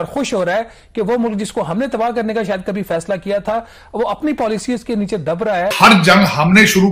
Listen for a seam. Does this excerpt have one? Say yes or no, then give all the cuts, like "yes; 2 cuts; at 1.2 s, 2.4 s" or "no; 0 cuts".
yes; 1 cut; at 5.7 s